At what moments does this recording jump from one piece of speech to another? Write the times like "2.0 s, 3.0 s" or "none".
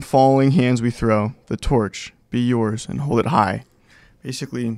none